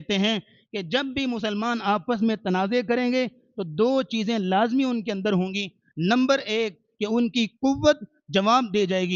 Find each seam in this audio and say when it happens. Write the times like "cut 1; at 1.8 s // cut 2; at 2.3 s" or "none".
none